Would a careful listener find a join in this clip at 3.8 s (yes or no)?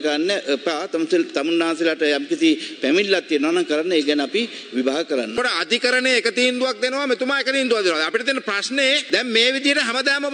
no